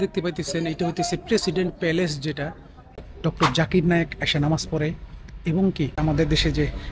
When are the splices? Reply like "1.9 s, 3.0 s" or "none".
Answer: 3.0 s, 6.0 s